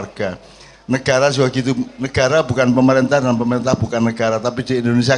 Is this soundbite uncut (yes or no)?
yes